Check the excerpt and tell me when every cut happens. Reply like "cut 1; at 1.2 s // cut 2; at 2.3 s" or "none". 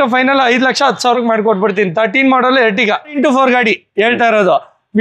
cut 1; at 3.1 s